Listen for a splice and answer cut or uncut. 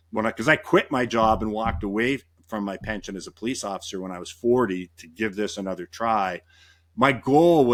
uncut